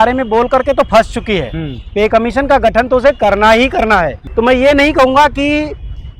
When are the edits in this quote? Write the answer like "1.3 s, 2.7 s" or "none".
4.2 s

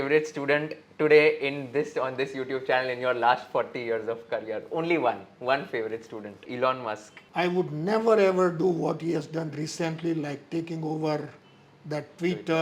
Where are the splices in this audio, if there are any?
6.5 s, 7.2 s

